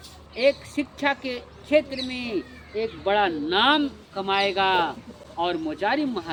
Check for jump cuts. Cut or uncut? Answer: uncut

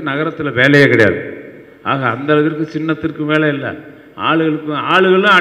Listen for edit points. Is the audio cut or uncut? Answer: uncut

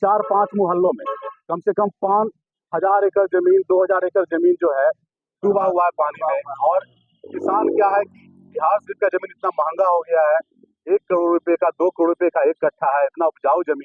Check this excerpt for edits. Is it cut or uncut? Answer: uncut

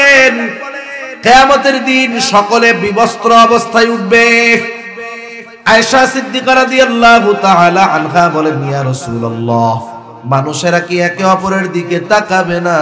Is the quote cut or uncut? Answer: uncut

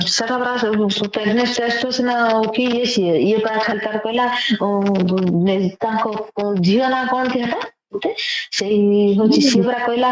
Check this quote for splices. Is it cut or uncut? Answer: uncut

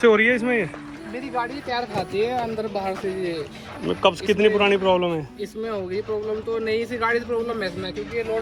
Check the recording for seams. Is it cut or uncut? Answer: uncut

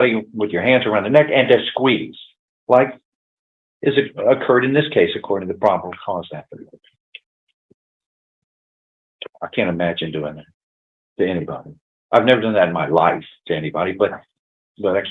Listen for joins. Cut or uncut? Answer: uncut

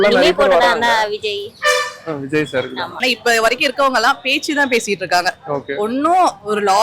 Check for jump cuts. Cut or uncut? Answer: cut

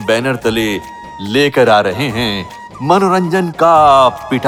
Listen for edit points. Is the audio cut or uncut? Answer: uncut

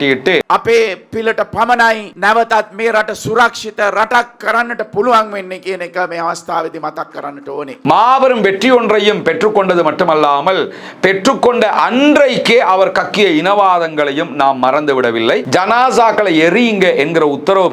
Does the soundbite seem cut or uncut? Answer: cut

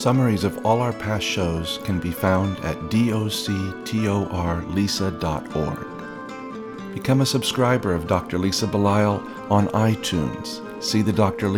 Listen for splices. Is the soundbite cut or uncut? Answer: uncut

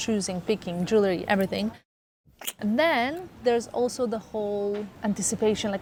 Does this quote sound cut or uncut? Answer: uncut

